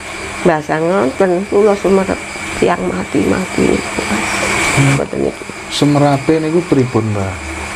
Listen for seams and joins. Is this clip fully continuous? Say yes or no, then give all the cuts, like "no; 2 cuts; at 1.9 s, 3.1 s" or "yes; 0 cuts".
no; 1 cut; at 5.0 s